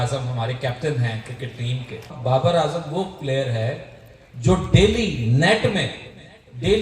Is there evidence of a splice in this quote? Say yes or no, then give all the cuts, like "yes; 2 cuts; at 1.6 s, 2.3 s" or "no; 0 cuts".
yes; 1 cut; at 2.1 s